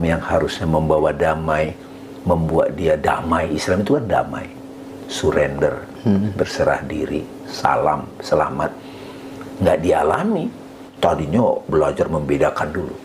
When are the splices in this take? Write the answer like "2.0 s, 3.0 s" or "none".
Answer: 10.8 s